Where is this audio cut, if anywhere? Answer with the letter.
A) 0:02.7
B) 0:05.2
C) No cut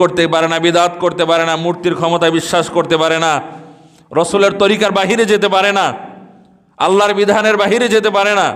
C